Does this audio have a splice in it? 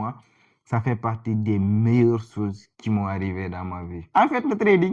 yes; 1 cut; at 4.0 s

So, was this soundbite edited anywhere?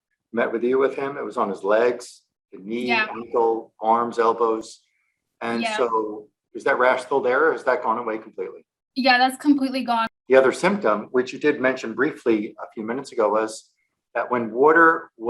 yes; 1 cut; at 10.1 s

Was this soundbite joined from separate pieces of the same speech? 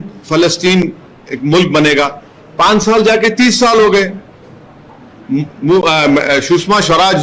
no; 0 cuts

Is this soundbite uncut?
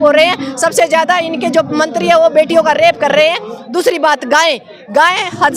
yes; 0 cuts

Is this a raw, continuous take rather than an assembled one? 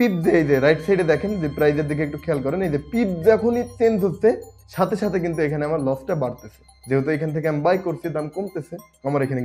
yes; 0 cuts

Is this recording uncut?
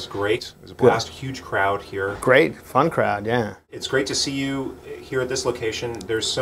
yes; 0 cuts

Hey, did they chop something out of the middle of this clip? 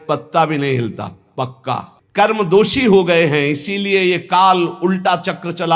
yes; 1 cut; at 1.9 s

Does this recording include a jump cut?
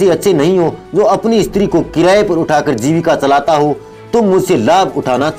no; 0 cuts

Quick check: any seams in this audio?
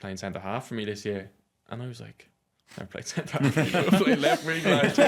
no; 0 cuts

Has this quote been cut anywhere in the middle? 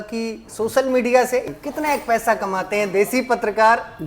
yes; 1 cut; at 1.5 s

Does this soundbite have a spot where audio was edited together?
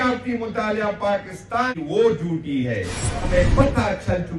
yes; 2 cuts; at 1.7 s, 3.2 s

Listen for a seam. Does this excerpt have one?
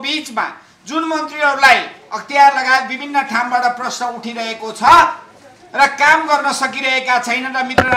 no; 0 cuts

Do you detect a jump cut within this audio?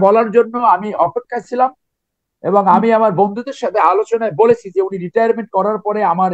no; 0 cuts

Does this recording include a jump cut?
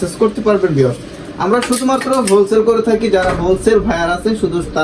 no; 0 cuts

